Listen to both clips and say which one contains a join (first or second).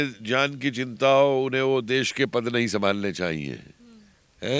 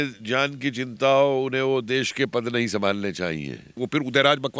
second